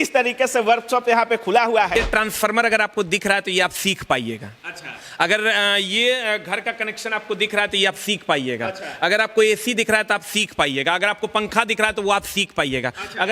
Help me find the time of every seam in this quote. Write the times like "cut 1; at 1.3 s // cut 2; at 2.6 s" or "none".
cut 1; at 2.0 s